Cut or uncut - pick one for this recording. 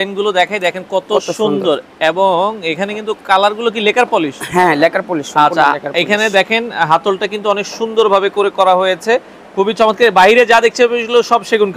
uncut